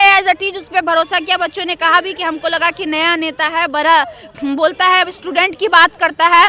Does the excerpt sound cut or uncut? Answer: uncut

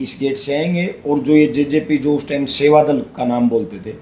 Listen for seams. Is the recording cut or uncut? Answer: uncut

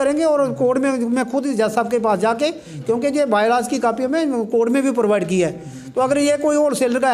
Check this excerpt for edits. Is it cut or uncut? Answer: uncut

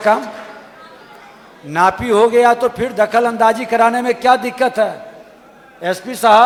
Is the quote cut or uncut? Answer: uncut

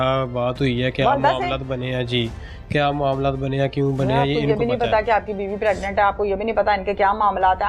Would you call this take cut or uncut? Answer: uncut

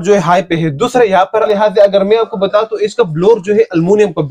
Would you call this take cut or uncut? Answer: cut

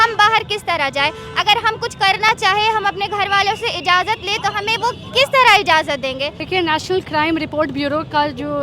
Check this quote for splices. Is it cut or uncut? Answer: cut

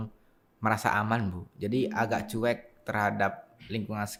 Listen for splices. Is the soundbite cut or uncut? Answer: uncut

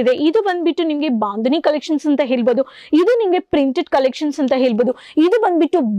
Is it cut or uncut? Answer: uncut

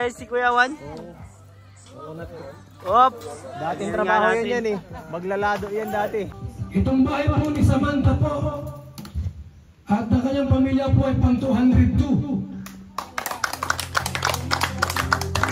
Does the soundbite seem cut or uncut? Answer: cut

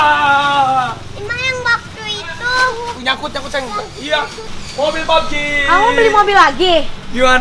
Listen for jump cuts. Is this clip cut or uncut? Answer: cut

